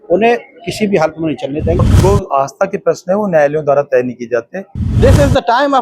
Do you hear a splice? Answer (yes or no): yes